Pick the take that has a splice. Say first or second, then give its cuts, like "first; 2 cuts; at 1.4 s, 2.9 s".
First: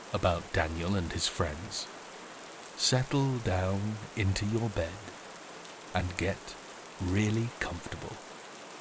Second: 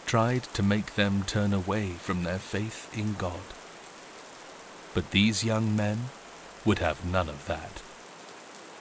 second; 3 cuts; at 3.4 s, 4.9 s, 7.7 s